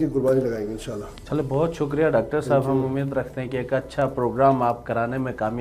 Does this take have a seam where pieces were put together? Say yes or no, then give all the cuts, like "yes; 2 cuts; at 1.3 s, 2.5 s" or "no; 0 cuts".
no; 0 cuts